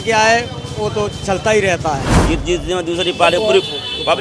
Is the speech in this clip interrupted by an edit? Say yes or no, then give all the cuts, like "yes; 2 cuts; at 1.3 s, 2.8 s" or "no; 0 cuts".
yes; 1 cut; at 2.1 s